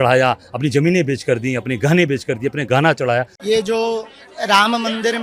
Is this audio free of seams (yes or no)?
no